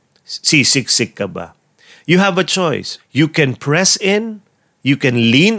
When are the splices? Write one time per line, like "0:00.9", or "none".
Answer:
0:03.0

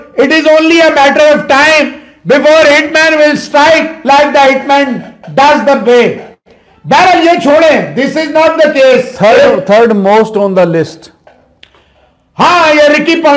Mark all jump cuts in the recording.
none

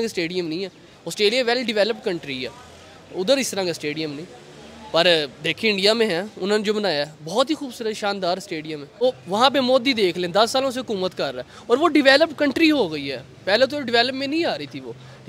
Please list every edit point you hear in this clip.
0:09.0

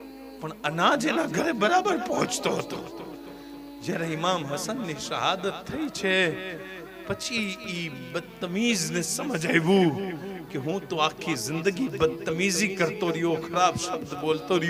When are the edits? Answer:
none

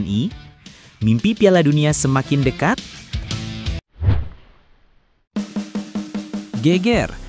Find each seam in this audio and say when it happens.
0:03.8

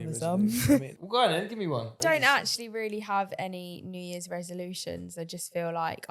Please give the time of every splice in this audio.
0:00.9
0:02.0

